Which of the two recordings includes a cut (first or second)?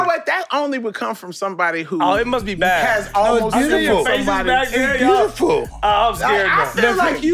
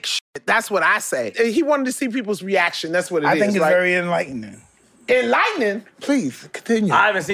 second